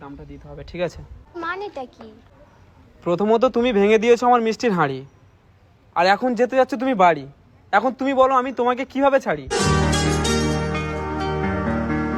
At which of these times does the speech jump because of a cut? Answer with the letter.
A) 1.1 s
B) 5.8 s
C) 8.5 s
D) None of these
A